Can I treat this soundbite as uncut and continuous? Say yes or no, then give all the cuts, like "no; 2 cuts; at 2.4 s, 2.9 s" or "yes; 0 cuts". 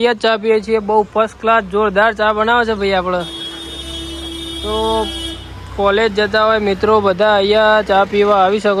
yes; 0 cuts